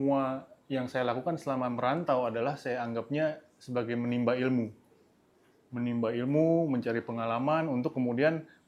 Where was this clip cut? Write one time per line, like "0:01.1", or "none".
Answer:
none